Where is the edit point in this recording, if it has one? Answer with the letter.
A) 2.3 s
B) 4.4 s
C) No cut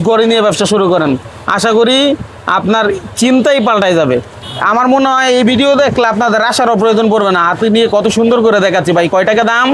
B